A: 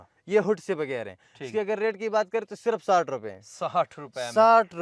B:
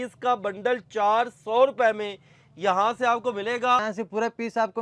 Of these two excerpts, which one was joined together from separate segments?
B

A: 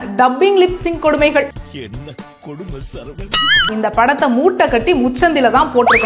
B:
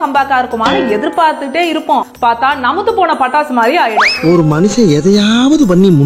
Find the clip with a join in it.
A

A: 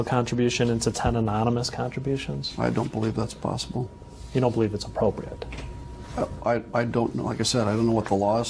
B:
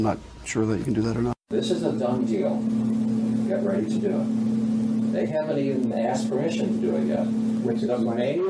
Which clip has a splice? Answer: B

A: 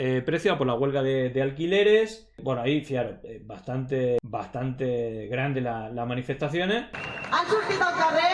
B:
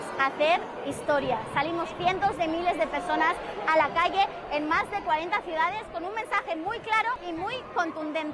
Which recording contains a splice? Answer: A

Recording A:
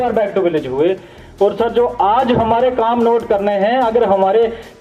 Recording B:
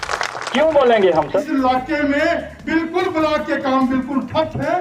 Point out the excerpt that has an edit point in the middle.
B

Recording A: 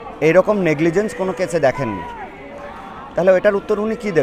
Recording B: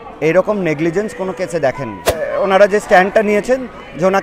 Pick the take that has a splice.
B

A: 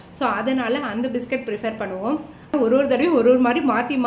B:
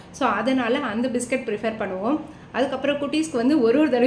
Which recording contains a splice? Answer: A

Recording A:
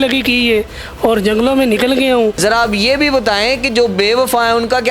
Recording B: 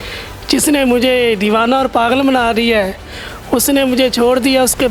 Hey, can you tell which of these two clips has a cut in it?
A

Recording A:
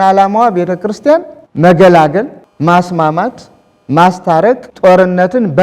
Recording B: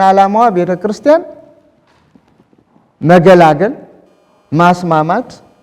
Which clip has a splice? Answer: A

